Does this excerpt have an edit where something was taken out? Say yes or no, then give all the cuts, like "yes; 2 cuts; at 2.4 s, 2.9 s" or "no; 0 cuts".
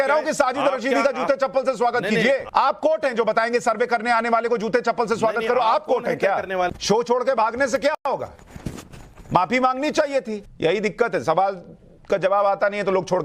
yes; 3 cuts; at 2.5 s, 6.7 s, 10.4 s